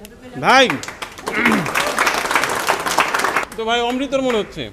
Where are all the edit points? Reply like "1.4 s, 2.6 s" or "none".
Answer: 3.4 s